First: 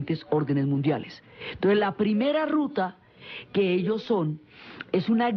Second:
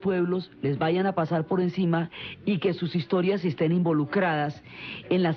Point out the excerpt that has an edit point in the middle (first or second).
second